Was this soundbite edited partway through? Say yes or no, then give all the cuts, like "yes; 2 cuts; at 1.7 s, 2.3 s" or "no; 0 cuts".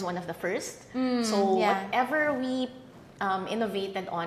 no; 0 cuts